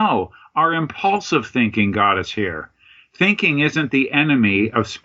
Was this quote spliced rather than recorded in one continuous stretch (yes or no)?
no